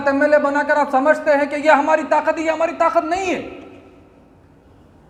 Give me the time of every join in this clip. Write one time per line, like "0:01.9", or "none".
none